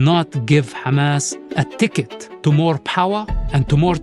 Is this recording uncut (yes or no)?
no